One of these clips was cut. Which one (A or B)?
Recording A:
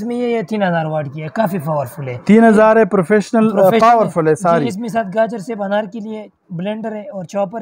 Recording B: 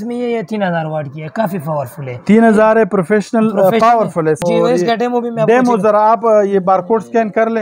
B